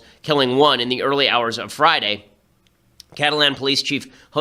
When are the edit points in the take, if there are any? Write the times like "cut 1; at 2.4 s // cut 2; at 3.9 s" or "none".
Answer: none